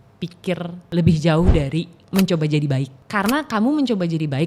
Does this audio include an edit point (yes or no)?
yes